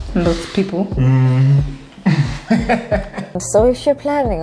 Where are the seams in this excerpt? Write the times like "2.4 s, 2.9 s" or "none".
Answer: 3.4 s